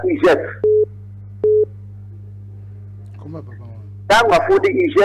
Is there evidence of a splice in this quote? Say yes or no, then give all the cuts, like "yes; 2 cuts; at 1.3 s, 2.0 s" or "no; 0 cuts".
no; 0 cuts